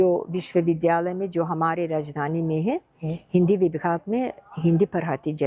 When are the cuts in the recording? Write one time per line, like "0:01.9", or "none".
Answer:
none